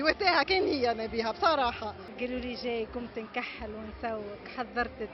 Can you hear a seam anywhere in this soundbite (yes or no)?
yes